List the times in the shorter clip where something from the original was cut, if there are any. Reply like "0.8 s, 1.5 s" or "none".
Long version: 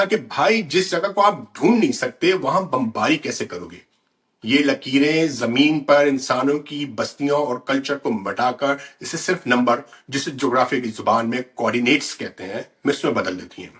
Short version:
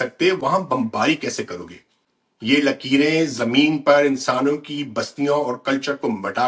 none